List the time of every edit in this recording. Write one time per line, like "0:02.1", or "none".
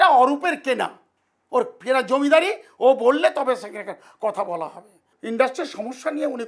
0:05.1